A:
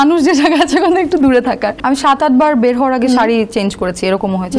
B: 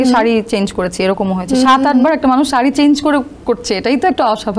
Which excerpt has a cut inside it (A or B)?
A